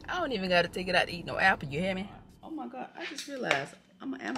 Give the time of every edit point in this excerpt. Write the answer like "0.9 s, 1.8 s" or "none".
2.3 s